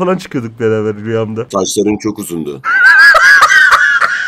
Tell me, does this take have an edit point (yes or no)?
no